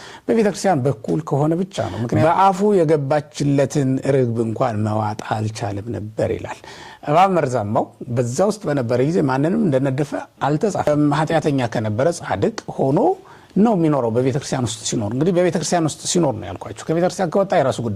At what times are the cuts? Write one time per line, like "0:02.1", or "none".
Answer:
0:02.2
0:10.9